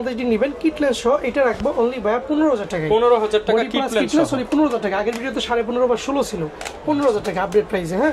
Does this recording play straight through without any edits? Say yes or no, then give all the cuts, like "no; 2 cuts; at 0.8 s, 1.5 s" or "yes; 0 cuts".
yes; 0 cuts